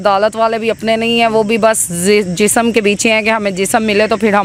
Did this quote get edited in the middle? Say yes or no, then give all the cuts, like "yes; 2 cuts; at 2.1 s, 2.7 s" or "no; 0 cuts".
no; 0 cuts